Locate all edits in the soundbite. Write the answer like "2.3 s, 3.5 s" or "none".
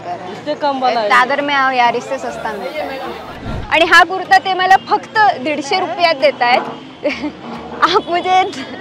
3.5 s